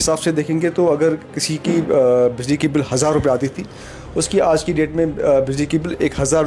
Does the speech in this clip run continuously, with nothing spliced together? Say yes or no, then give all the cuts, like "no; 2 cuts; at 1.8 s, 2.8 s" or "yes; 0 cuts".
yes; 0 cuts